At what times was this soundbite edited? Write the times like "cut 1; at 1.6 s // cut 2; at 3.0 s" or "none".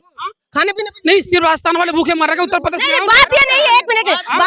none